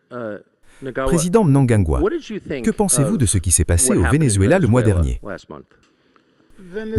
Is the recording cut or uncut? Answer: cut